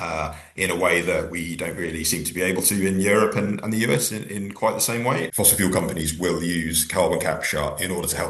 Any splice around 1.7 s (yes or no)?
no